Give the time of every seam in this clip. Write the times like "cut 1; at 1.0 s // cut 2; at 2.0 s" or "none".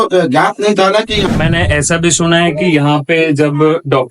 cut 1; at 1.2 s